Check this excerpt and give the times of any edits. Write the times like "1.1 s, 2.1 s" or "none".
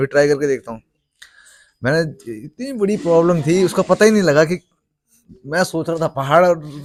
none